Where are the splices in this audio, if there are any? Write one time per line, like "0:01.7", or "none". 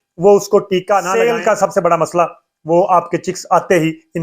0:01.1